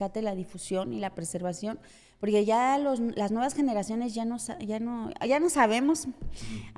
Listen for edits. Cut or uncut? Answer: uncut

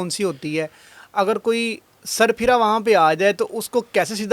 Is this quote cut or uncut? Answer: uncut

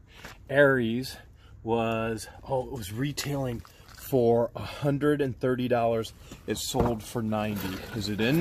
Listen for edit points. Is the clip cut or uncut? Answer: uncut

